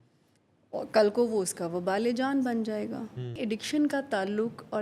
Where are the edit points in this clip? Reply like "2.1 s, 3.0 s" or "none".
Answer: 3.4 s